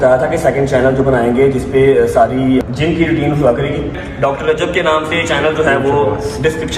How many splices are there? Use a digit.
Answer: 2